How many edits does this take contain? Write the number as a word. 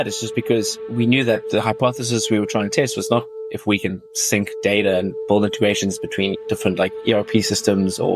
zero